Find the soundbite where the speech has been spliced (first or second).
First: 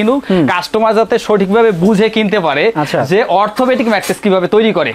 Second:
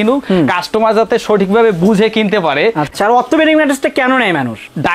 second